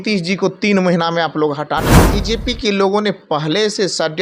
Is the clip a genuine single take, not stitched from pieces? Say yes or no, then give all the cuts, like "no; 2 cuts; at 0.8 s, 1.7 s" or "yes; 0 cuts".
no; 1 cut; at 2.1 s